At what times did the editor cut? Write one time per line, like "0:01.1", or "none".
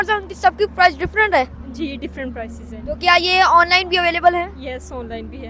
none